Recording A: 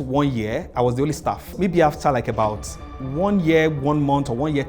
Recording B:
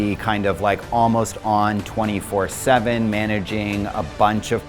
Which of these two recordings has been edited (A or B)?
A